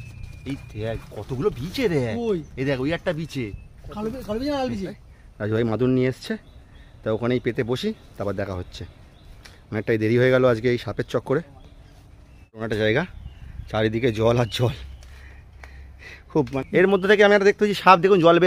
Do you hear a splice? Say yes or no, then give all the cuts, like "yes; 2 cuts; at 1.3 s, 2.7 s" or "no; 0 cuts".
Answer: yes; 3 cuts; at 5.0 s, 12.6 s, 16.5 s